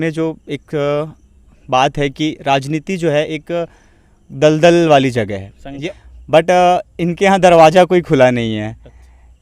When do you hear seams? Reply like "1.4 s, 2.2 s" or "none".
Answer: 5.8 s